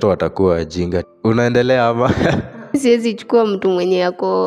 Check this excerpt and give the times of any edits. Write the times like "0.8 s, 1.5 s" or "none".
1.1 s, 2.8 s